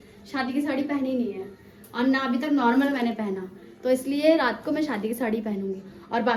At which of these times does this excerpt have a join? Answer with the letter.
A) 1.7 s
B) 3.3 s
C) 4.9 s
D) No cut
D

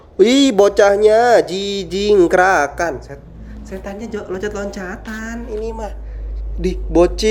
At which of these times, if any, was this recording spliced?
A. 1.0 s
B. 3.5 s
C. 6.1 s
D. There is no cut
D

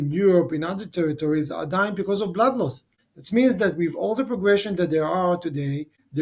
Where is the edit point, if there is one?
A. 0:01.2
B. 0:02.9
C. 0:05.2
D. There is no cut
D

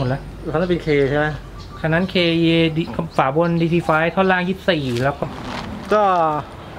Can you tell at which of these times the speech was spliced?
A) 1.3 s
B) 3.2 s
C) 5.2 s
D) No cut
C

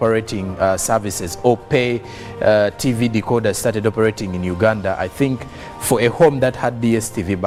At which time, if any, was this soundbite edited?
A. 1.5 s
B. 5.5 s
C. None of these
C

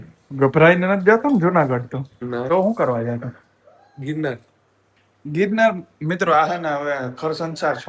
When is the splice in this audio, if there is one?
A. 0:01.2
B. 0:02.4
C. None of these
B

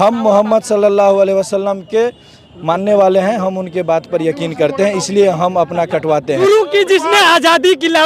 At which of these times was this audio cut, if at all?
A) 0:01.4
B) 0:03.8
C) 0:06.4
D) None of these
C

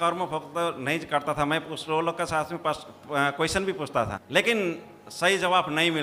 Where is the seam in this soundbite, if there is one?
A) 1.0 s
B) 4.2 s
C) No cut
B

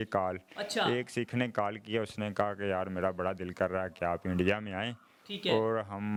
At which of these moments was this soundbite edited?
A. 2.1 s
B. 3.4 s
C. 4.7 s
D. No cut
D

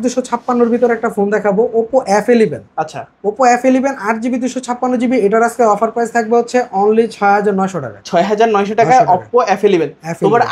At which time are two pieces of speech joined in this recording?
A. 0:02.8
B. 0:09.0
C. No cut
C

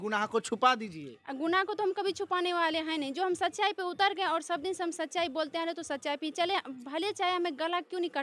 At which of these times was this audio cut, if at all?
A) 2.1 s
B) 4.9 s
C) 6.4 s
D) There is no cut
D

